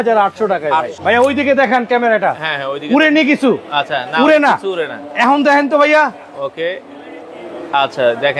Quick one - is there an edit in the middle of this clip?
yes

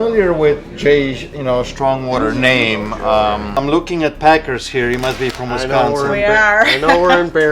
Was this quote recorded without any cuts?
no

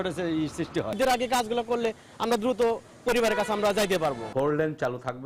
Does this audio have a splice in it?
yes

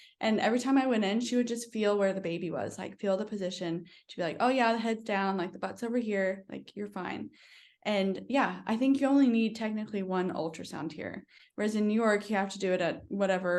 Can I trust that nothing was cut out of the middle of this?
yes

